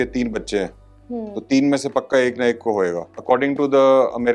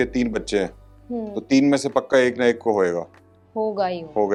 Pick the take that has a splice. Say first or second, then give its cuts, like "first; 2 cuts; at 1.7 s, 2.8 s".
first; 1 cut; at 3.1 s